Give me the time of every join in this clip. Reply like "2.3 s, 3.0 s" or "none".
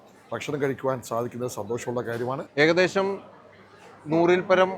2.4 s

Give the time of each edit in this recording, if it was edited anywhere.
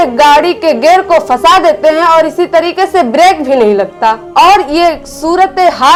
none

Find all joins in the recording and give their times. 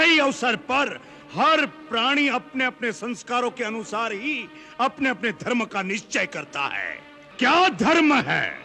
7.2 s

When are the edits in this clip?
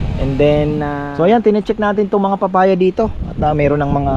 1.0 s

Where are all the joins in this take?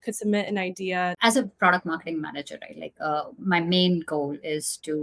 1.2 s

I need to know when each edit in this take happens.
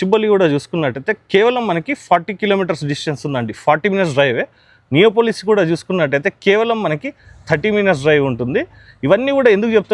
none

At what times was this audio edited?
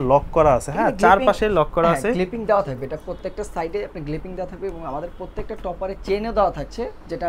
none

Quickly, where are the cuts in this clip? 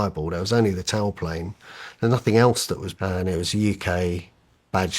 2.9 s

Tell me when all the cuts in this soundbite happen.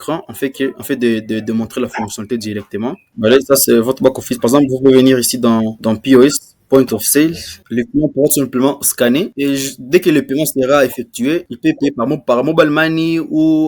3.1 s, 7.6 s

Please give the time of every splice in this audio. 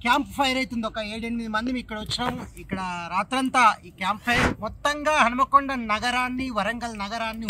4.5 s

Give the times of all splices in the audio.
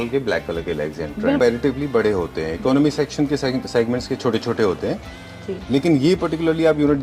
1.4 s

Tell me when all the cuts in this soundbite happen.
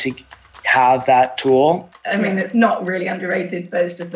1.9 s

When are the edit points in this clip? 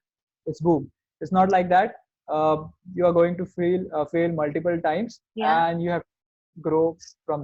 none

